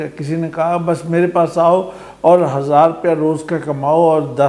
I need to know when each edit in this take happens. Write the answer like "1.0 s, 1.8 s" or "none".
none